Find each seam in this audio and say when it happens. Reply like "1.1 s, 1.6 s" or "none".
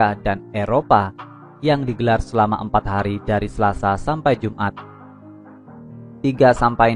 4.7 s, 6.2 s